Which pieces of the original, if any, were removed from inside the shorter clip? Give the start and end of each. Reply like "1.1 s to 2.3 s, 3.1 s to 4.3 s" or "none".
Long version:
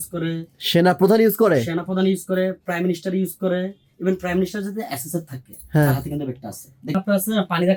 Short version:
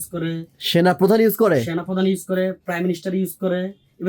none